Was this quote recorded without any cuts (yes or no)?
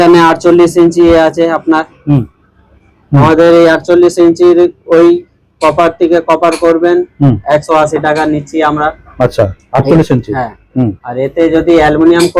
yes